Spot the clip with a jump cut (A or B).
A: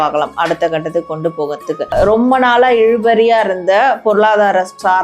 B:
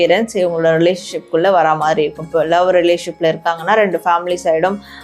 A